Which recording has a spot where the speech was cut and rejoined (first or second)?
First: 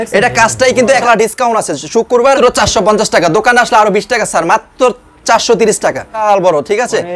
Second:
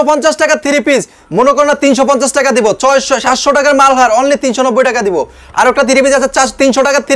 first